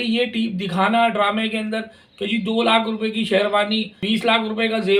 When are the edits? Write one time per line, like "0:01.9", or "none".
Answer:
0:04.0